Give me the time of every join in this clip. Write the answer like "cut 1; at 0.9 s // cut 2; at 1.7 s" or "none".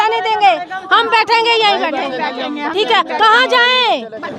none